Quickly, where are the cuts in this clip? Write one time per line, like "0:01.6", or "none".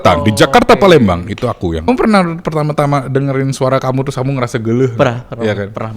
0:01.9